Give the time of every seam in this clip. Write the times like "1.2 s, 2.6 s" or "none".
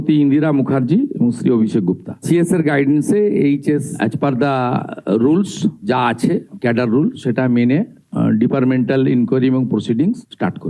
none